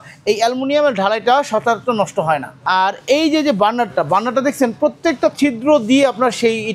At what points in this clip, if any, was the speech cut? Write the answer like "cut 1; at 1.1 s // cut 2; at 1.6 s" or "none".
cut 1; at 2.5 s